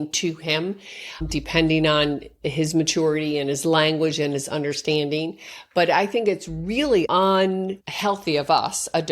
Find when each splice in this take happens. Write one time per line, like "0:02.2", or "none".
0:07.1
0:07.8